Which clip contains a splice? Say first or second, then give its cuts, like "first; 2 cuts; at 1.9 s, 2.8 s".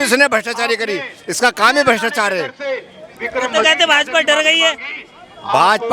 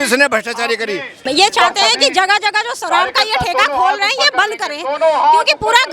second; 1 cut; at 1.1 s